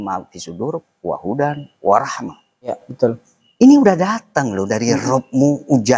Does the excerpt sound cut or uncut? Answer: cut